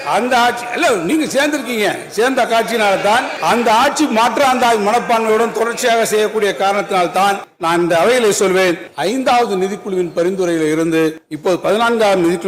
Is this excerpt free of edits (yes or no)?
yes